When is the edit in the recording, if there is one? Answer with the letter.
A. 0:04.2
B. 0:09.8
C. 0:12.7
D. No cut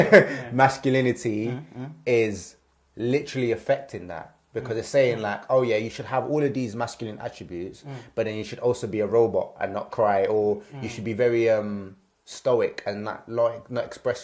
D